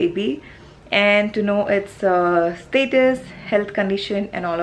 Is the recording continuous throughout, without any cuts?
yes; 0 cuts

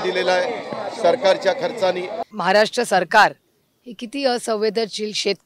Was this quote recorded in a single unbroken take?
no; 1 cut; at 2.2 s

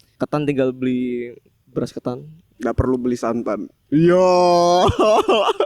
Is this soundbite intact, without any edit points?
no; 2 cuts; at 2.5 s, 3.7 s

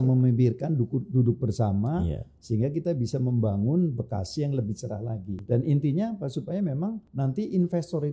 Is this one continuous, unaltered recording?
no; 2 cuts; at 5.4 s, 7.1 s

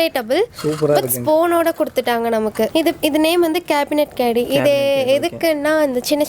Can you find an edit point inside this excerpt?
yes; 1 cut; at 2.7 s

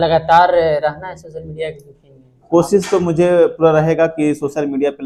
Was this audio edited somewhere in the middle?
no; 0 cuts

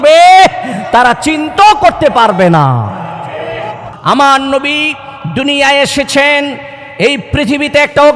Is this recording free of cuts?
no; 1 cut; at 3.9 s

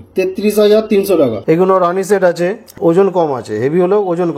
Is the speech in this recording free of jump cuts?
no; 2 cuts; at 1.4 s, 2.7 s

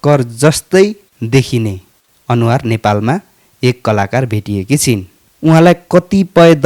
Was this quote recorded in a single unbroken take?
yes; 0 cuts

